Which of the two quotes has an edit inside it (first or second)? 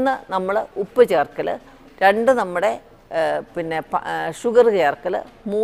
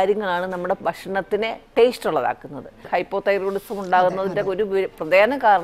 second